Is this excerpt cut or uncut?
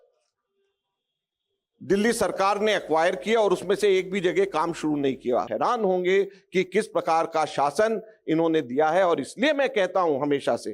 cut